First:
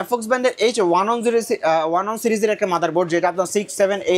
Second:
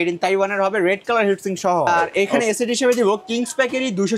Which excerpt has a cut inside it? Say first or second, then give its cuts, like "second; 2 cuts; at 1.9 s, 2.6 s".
second; 1 cut; at 1.9 s